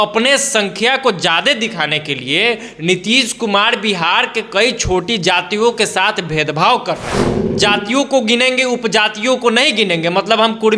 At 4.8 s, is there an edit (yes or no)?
no